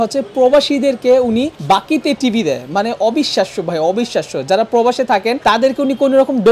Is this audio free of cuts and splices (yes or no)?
yes